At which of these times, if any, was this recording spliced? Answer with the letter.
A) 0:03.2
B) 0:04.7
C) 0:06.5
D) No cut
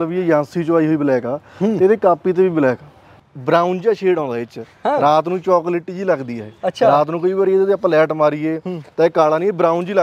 A